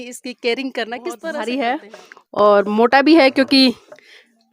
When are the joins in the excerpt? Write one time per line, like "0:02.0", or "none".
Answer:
0:01.4